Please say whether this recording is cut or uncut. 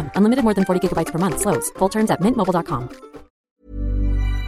cut